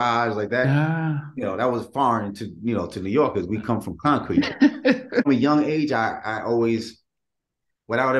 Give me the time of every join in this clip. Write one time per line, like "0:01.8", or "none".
0:05.3